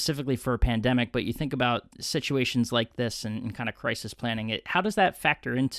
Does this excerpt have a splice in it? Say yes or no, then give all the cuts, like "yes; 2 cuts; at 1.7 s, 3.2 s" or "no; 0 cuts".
no; 0 cuts